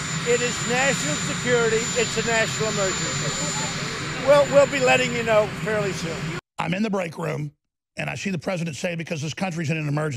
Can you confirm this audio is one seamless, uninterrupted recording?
no; 1 cut; at 6.3 s

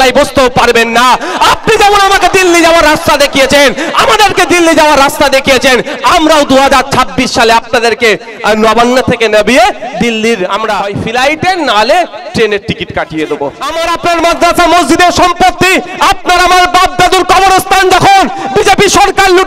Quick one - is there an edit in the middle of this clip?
yes; 2 cuts; at 10.8 s, 13.7 s

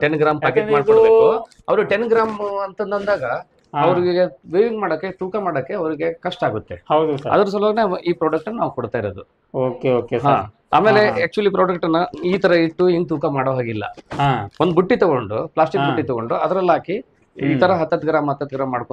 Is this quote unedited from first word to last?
yes; 0 cuts

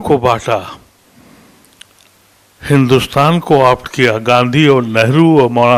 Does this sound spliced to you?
no; 0 cuts

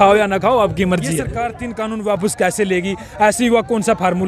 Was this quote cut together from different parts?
yes; 1 cut; at 1.3 s

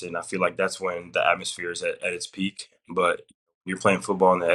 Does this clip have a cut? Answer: no; 0 cuts

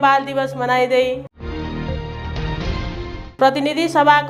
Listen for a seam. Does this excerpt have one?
no; 0 cuts

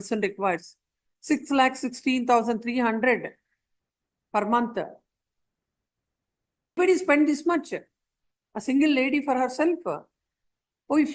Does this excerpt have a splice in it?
yes; 1 cut; at 6.8 s

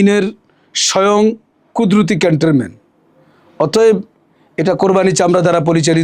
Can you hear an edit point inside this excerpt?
no; 0 cuts

